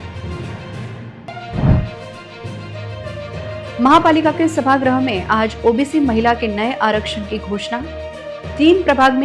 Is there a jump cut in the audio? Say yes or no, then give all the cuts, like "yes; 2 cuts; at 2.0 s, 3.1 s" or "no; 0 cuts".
no; 0 cuts